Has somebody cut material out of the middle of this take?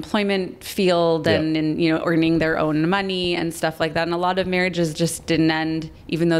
no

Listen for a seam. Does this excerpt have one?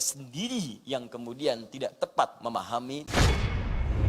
yes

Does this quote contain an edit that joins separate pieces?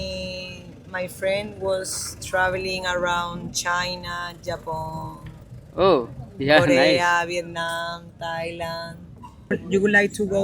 yes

